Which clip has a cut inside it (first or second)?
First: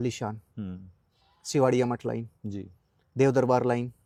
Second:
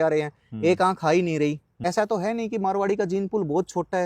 second